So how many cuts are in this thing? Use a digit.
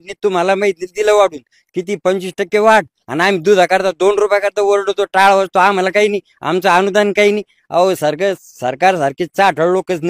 0